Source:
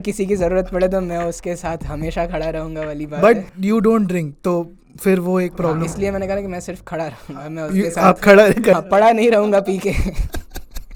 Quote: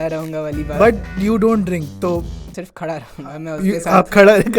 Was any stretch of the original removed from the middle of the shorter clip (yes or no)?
yes